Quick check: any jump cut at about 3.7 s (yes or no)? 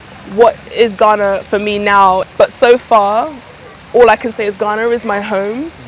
no